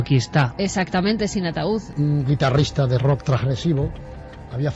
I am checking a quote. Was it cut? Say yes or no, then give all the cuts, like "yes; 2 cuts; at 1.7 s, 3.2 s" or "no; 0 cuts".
yes; 1 cut; at 1.9 s